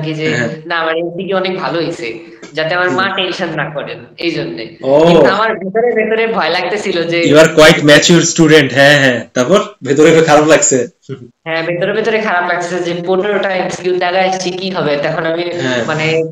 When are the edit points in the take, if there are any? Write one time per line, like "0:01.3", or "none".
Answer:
none